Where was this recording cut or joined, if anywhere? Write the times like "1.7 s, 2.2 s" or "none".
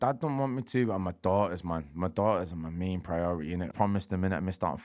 3.7 s